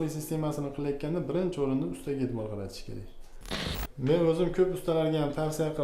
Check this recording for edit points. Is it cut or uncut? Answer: cut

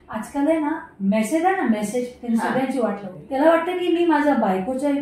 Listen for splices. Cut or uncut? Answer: cut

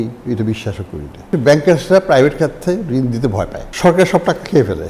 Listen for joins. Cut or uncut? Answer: cut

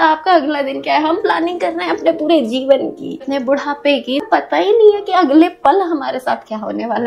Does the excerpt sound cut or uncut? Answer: uncut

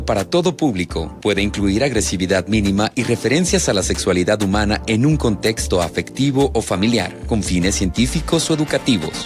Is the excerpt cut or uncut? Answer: uncut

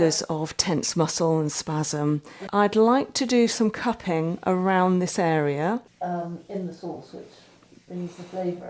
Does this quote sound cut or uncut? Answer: cut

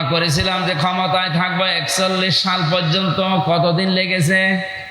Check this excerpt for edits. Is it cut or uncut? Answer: uncut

